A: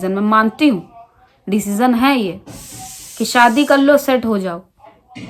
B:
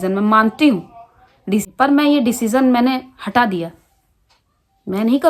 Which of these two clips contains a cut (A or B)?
B